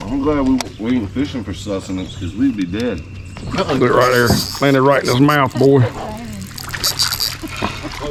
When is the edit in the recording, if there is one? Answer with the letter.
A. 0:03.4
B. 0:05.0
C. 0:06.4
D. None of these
D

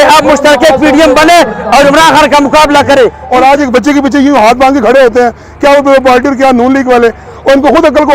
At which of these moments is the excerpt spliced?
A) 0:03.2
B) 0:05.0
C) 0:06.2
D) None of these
A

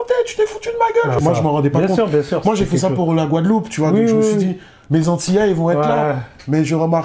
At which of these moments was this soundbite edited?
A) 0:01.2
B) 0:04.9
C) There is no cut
A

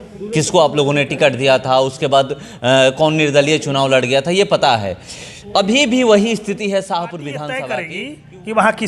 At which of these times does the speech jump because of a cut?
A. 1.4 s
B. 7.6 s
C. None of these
B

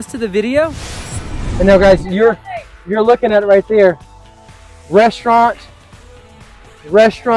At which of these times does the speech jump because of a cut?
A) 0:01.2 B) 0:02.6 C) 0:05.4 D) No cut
A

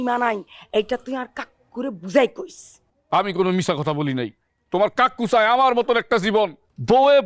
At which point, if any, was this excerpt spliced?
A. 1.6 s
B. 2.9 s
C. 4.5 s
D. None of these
D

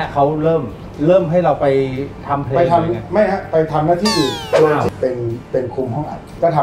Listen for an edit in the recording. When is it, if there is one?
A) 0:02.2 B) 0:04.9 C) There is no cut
B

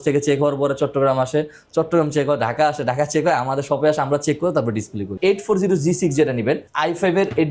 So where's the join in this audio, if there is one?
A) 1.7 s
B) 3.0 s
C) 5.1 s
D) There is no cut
C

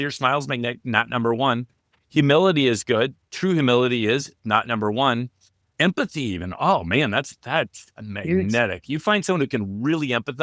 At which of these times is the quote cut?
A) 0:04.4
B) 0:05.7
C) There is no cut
B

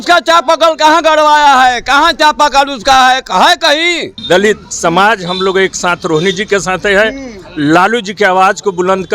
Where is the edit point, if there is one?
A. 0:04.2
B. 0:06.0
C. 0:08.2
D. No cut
A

